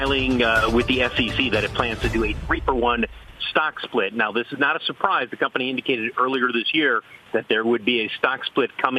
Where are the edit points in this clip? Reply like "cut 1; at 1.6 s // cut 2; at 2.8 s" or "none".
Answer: none